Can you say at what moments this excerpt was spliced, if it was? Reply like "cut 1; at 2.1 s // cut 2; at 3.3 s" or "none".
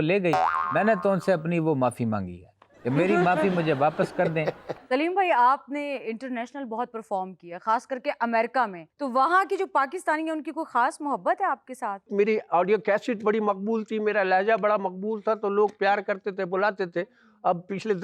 cut 1; at 4.7 s // cut 2; at 12.1 s